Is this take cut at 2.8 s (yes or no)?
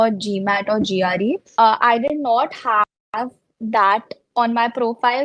no